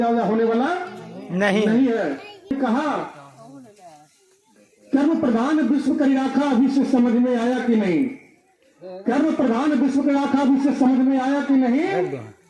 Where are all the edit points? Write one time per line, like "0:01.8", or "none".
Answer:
0:02.5

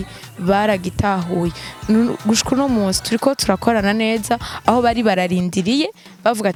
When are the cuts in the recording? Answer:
none

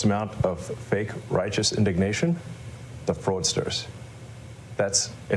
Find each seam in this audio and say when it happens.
none

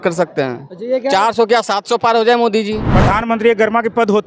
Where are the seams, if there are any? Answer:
0:02.8

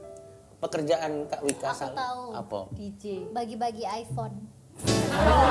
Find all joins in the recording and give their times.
none

